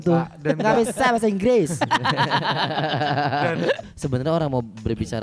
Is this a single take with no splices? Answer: no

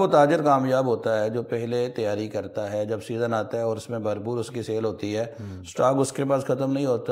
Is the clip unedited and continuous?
yes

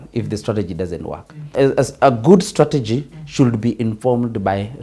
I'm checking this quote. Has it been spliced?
yes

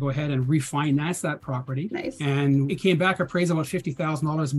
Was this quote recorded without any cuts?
no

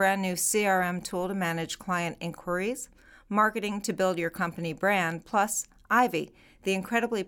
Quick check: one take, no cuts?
yes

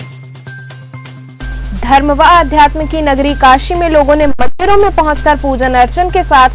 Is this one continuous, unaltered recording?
no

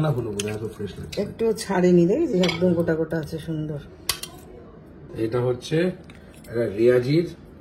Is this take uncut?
no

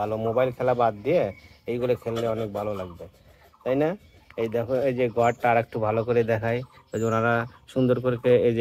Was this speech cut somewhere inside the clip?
no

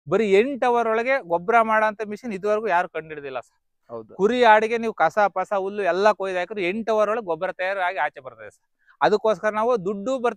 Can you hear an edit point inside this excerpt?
no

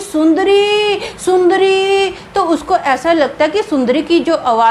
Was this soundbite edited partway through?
no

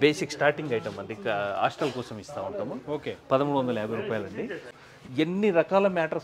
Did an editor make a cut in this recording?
yes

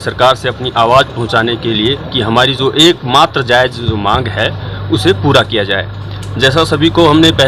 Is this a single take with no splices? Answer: yes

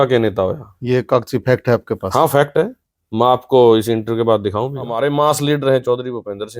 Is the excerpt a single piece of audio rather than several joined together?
no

